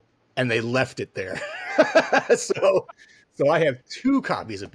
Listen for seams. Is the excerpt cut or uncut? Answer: uncut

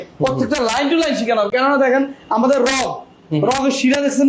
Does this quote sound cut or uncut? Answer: uncut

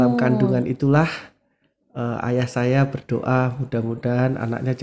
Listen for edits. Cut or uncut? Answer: uncut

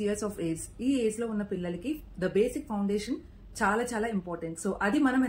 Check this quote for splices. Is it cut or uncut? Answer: uncut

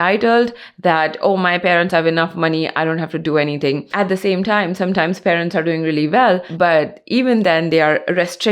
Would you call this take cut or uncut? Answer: cut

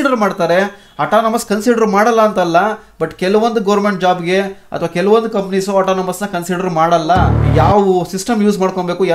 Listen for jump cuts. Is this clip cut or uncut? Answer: cut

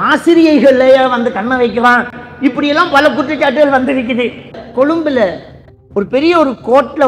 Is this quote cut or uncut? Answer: cut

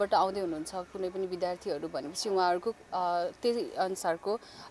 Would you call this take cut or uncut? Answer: uncut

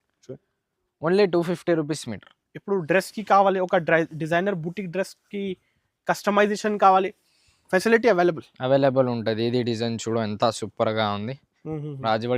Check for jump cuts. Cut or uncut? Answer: uncut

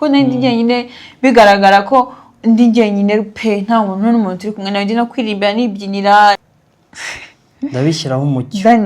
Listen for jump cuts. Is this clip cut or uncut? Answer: cut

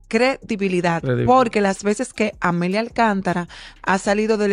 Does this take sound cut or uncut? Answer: uncut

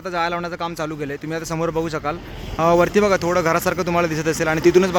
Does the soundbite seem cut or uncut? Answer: uncut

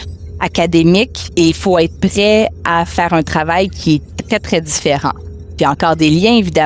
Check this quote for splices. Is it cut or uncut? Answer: cut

